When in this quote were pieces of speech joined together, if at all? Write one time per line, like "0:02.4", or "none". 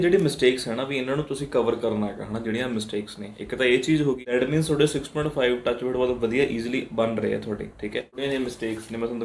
0:04.2
0:08.1